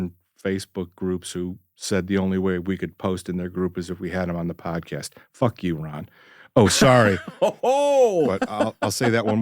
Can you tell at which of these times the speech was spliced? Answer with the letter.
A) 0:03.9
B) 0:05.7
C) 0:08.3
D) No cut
C